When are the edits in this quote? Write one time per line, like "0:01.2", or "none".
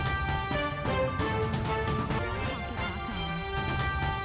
0:01.6